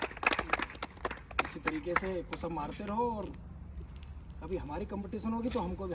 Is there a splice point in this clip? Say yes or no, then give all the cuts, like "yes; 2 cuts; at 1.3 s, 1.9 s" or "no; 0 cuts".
no; 0 cuts